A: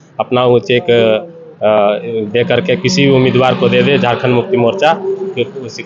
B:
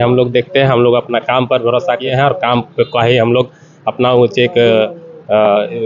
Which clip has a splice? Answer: B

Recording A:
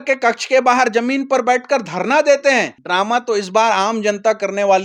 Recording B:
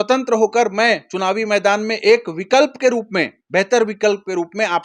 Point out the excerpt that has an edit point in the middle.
A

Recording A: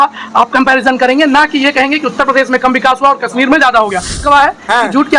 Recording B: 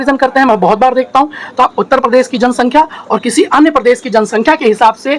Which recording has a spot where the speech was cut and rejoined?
A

